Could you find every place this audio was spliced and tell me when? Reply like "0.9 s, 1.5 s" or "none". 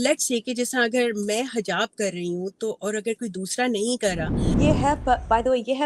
4.5 s